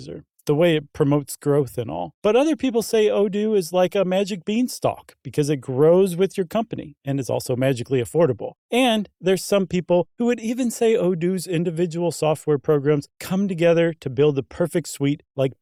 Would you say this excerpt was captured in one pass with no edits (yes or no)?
yes